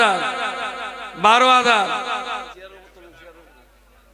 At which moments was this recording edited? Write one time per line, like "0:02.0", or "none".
0:02.5

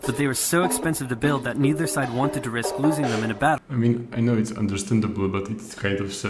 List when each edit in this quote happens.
0:03.6

